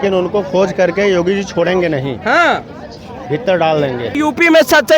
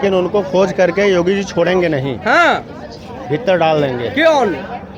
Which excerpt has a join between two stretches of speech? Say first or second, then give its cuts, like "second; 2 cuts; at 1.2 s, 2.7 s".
first; 1 cut; at 4.1 s